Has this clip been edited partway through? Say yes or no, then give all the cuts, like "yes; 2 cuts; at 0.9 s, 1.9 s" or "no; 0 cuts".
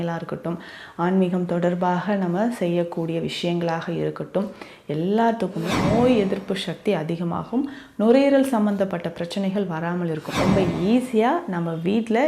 yes; 2 cuts; at 5.7 s, 10.3 s